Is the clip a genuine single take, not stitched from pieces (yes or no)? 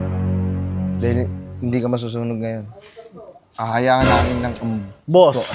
yes